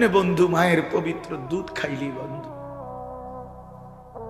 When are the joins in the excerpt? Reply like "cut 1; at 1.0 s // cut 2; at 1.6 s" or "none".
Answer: cut 1; at 2.8 s